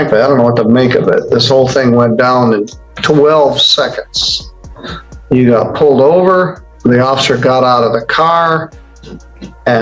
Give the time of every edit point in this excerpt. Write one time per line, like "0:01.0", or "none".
0:06.6